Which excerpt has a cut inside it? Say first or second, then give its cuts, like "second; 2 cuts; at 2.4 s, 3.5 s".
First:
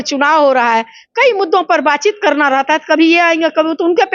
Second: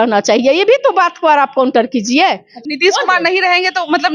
second; 1 cut; at 2.5 s